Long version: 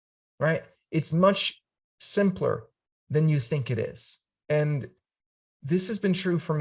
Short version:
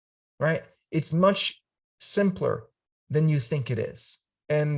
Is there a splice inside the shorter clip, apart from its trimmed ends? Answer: no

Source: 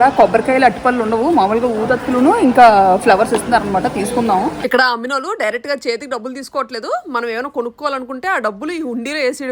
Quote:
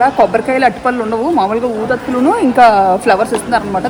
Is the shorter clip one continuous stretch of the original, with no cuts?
yes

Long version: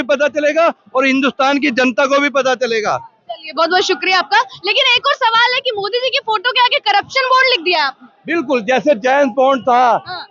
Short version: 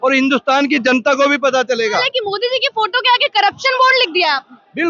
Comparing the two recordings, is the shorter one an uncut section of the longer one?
no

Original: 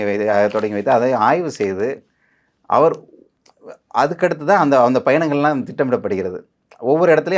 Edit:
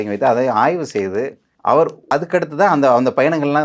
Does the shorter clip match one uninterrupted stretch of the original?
no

